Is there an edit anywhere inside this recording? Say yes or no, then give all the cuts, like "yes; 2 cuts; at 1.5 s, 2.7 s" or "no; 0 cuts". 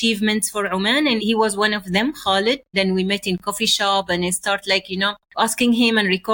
yes; 3 cuts; at 1.2 s, 2.7 s, 5.2 s